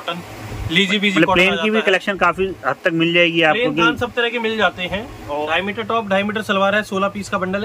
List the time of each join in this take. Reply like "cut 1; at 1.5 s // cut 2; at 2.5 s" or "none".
cut 1; at 5.5 s